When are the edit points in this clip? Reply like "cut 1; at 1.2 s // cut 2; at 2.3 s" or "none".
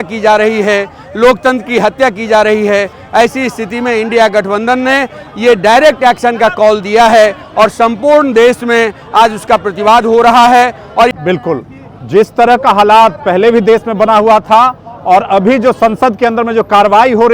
cut 1; at 11.1 s